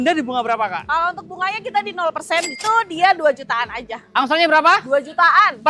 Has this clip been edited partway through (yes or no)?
yes